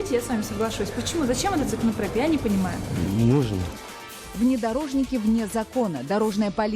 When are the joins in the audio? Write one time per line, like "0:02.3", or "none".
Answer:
0:03.7